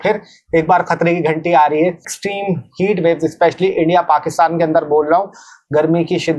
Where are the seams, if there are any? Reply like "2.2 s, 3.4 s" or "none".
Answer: 2.2 s